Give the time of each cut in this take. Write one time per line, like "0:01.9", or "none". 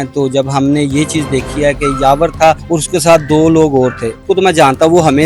0:02.6
0:04.2